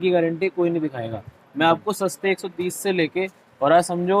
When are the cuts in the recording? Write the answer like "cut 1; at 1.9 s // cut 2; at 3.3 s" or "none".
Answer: none